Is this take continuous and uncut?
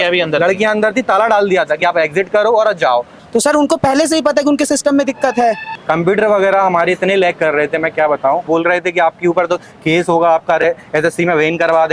no; 3 cuts; at 3.2 s, 5.7 s, 8.5 s

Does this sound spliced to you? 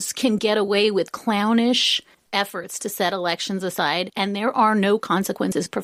no; 0 cuts

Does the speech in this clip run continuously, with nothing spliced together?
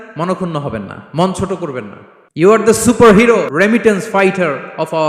no; 2 cuts; at 2.5 s, 3.5 s

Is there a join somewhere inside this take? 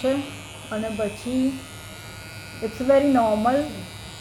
no; 0 cuts

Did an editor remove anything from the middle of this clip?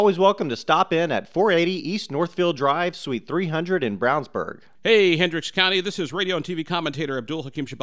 yes; 1 cut; at 4.6 s

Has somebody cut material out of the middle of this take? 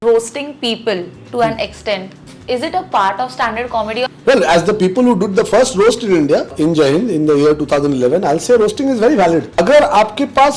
yes; 3 cuts; at 4.2 s, 6.5 s, 9.6 s

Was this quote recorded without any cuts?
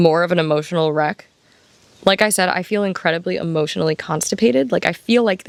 yes; 0 cuts

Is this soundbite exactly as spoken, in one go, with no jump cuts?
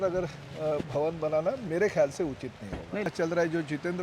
no; 1 cut; at 3.1 s

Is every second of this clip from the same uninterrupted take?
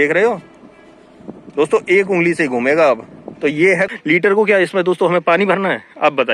no; 1 cut; at 3.9 s

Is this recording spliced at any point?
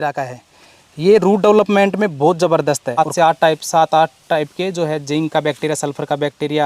yes; 1 cut; at 3.0 s

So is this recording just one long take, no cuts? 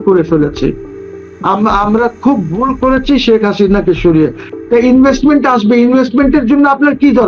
yes; 0 cuts

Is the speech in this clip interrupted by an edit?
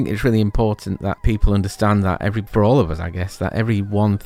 yes; 2 cuts; at 1.2 s, 2.4 s

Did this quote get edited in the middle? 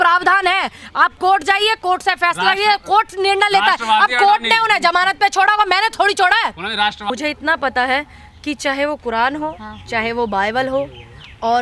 yes; 1 cut; at 7.1 s

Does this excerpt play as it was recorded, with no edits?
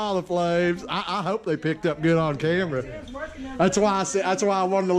yes; 0 cuts

